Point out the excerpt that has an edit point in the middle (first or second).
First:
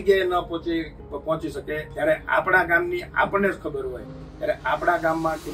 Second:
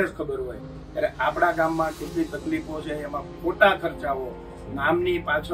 first